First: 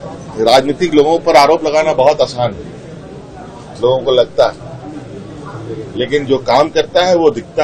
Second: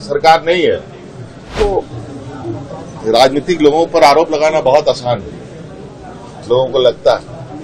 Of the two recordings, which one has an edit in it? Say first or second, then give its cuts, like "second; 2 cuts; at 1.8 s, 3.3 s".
second; 1 cut; at 1.6 s